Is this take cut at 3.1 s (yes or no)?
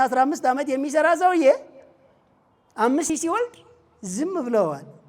yes